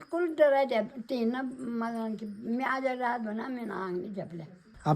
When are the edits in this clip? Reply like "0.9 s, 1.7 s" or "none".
none